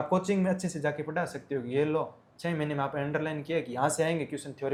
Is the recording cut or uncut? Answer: uncut